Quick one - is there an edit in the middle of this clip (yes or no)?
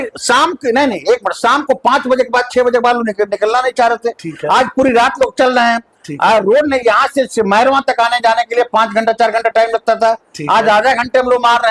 no